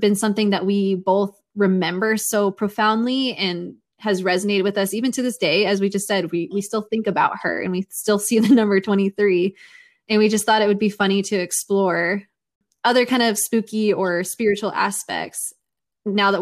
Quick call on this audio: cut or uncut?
cut